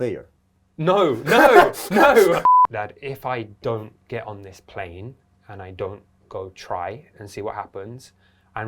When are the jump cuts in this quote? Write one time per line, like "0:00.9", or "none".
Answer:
0:02.4